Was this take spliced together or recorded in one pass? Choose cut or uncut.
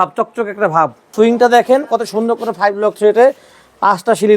cut